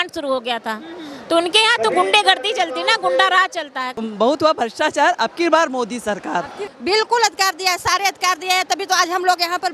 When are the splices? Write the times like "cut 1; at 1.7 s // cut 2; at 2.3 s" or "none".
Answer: cut 1; at 3.9 s // cut 2; at 6.6 s